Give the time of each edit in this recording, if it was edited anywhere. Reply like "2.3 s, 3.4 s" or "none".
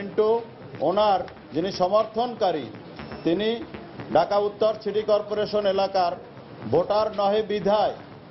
1.4 s